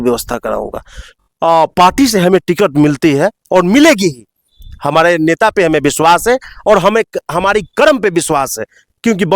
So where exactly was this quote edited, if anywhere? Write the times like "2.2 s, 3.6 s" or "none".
1.0 s